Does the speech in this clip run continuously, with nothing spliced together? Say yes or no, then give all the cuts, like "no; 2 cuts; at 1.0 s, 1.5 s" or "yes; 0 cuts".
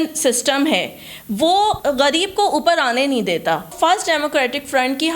no; 2 cuts; at 1.8 s, 3.7 s